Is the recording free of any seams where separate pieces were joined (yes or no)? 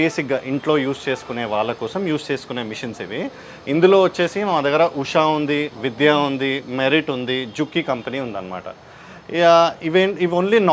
yes